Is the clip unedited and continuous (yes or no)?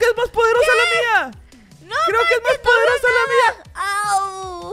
yes